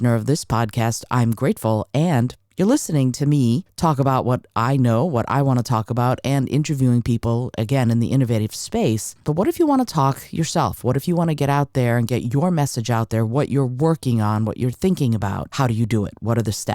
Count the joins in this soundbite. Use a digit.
3